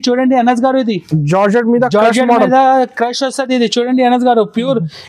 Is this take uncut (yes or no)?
yes